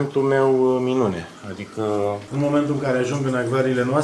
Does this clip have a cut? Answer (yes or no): yes